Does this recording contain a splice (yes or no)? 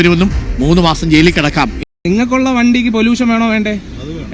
yes